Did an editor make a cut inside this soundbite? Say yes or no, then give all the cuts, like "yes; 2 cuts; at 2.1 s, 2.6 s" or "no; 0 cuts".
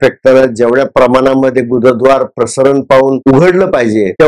yes; 1 cut; at 3.2 s